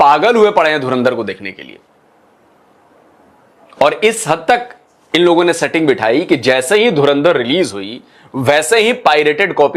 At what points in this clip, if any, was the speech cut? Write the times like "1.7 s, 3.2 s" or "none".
none